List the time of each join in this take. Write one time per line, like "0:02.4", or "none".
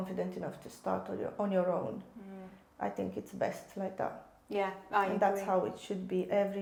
none